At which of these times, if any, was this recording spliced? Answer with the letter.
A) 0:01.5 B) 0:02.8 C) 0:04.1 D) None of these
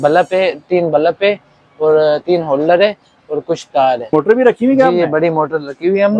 C